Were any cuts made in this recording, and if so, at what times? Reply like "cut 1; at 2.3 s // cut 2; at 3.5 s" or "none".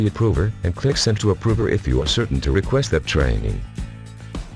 cut 1; at 3.6 s